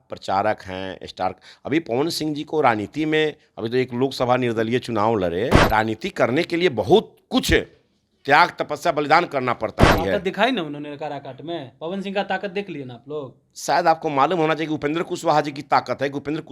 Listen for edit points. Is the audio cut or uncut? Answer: cut